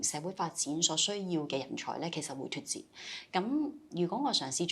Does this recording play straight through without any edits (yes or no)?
yes